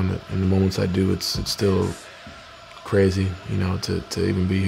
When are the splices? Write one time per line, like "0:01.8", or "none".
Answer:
none

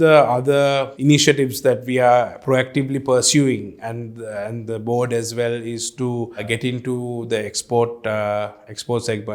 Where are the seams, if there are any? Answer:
0:00.9

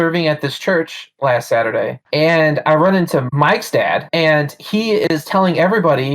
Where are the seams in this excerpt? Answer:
0:02.0

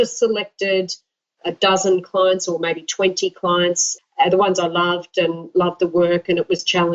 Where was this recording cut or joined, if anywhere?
0:01.3
0:03.9

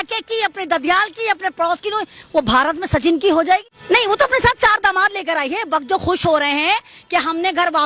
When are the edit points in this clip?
0:03.7

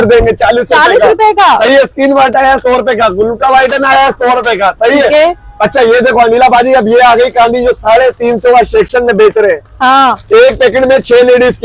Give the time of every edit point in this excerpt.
none

